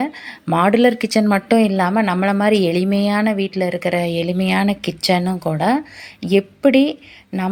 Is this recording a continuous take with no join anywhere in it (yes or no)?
yes